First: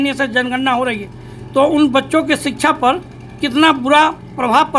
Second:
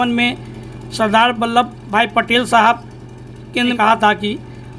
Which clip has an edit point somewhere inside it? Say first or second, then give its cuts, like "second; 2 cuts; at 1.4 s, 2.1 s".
second; 2 cuts; at 1.8 s, 3.7 s